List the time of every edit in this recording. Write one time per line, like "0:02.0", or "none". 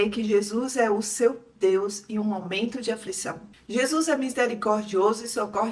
0:03.5